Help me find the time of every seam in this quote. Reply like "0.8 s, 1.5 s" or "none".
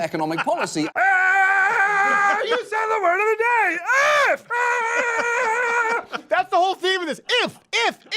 0.9 s